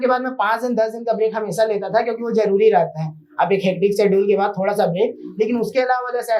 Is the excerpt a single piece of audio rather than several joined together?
yes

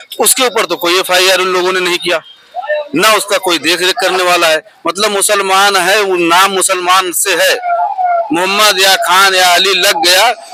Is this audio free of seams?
yes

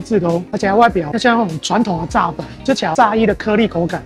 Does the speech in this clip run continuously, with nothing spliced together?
yes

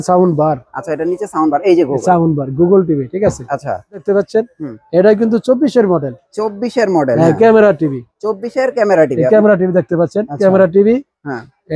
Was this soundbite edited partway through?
yes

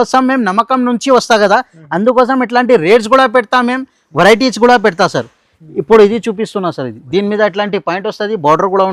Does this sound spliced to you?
no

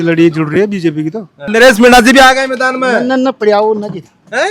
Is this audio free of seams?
no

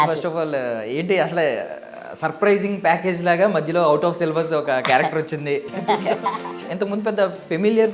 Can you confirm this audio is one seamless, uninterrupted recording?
no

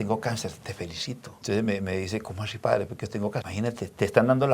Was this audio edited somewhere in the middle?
yes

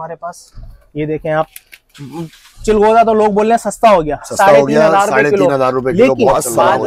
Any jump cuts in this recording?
no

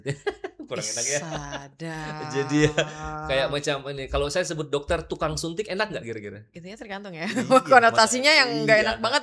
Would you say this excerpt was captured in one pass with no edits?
yes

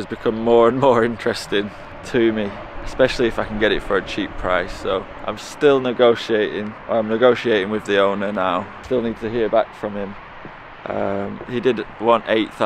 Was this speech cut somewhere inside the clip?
no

